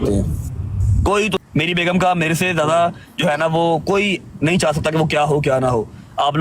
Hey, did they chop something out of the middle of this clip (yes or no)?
yes